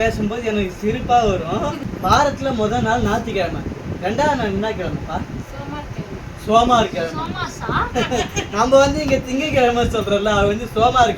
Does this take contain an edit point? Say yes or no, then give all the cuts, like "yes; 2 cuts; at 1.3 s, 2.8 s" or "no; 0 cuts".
yes; 1 cut; at 1.8 s